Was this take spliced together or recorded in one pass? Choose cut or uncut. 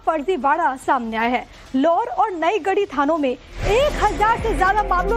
cut